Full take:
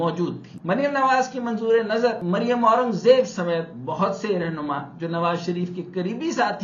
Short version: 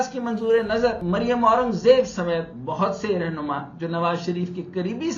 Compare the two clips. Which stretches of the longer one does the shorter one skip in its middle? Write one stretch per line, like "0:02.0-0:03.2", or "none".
none